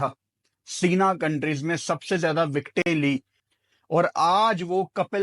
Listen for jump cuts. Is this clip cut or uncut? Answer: cut